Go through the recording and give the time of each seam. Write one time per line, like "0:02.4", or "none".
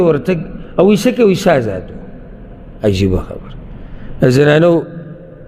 none